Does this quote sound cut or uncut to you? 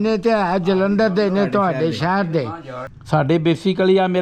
cut